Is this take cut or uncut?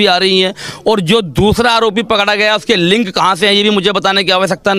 uncut